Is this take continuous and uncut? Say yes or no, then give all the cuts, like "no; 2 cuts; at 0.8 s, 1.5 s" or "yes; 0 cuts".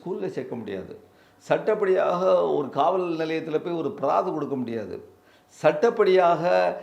yes; 0 cuts